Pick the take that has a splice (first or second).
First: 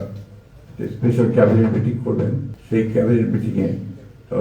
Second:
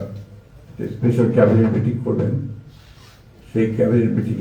first